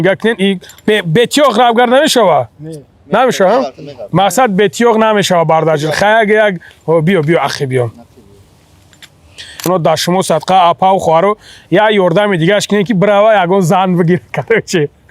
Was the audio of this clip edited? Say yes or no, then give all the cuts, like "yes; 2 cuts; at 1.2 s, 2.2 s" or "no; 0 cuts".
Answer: yes; 1 cut; at 9.7 s